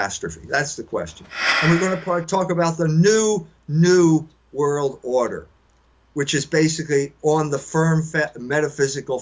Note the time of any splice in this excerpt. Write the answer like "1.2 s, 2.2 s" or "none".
1.4 s